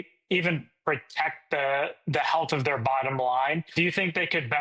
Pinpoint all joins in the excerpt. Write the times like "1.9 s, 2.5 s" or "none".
3.7 s